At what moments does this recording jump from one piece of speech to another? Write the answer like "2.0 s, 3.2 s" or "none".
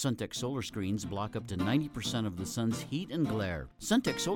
none